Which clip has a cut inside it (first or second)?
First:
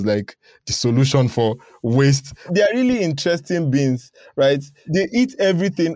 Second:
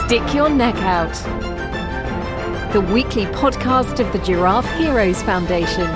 first